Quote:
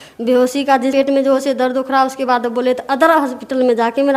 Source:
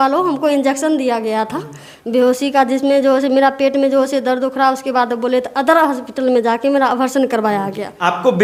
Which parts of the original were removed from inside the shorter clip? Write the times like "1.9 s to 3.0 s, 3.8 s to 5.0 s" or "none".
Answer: 2.8 s to 3.6 s